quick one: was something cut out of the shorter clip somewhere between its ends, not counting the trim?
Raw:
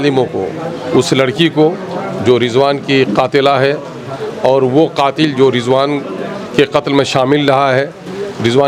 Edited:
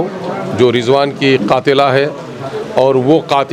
no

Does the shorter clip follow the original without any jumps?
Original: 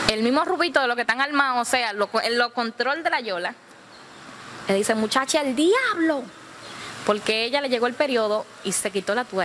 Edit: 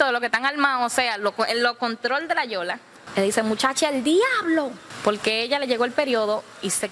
no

